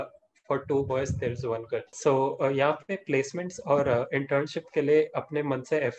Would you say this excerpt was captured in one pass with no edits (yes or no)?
no